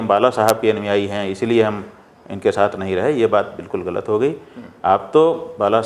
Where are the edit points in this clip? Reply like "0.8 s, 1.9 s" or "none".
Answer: none